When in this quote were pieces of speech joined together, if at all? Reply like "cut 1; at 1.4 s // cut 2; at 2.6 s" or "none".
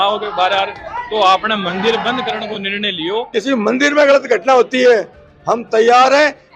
cut 1; at 3.3 s

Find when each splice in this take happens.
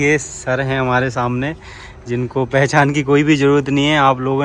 none

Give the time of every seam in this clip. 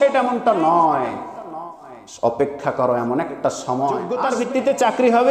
cut 1; at 4.1 s

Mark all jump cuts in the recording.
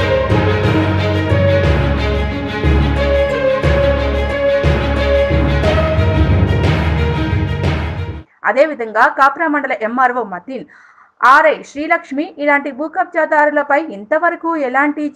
cut 1; at 8.1 s

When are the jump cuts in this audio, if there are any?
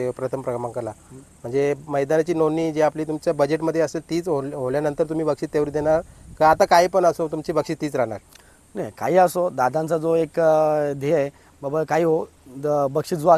none

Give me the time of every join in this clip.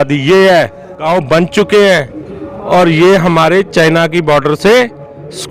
cut 1; at 1.0 s

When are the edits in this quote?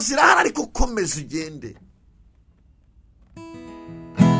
none

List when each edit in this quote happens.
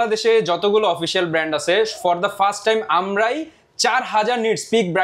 none

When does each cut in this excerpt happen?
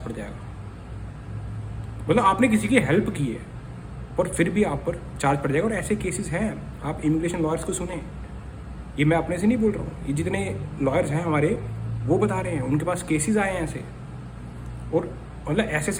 none

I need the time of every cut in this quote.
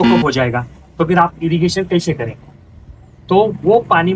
none

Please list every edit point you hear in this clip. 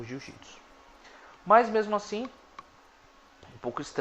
cut 1; at 2.3 s

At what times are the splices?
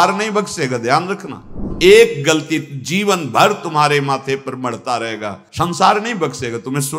cut 1; at 1.6 s

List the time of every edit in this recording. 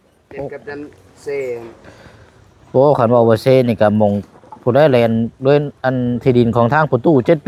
none

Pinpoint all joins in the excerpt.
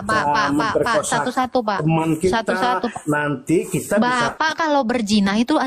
none

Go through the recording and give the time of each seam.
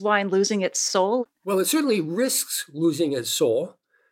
cut 1; at 1.2 s

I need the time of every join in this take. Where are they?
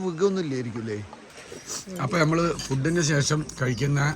cut 1; at 1.5 s

